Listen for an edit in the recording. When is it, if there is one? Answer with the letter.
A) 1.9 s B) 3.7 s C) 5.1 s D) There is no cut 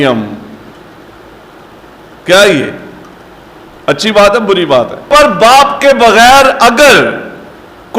C